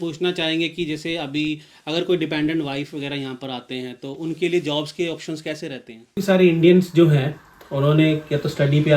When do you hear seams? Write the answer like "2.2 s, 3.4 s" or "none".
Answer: 6.2 s